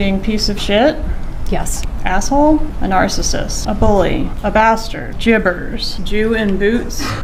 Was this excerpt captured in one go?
yes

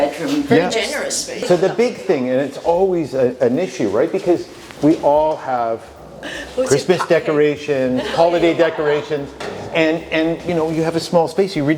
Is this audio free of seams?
no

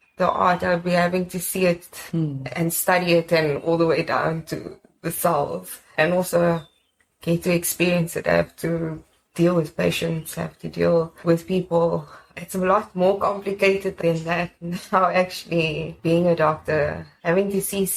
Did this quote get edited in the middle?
no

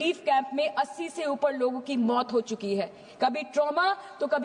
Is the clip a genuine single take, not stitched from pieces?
yes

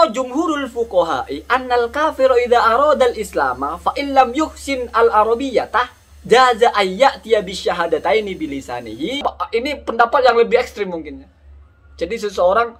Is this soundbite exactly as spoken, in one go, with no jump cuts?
no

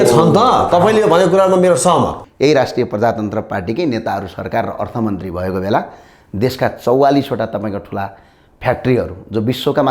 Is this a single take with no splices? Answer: no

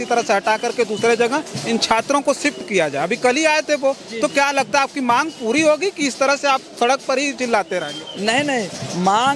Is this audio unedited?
yes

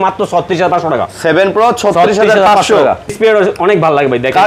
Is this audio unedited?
no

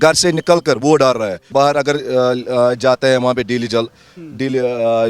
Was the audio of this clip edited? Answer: yes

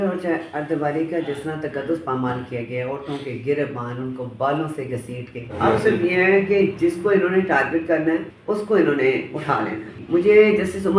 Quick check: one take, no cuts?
no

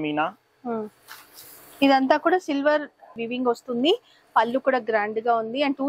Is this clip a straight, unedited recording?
no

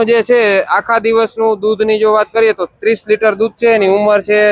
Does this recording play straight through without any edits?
yes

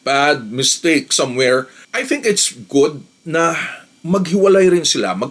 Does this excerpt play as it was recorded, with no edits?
yes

